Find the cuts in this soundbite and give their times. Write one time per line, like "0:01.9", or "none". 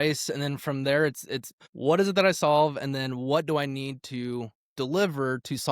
0:01.6